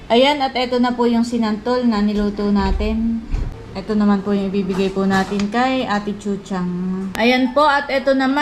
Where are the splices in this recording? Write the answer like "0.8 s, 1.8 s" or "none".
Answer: 3.4 s, 7.1 s